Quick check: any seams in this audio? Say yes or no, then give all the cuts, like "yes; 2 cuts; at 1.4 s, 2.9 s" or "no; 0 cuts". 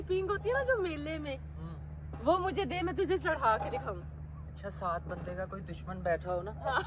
no; 0 cuts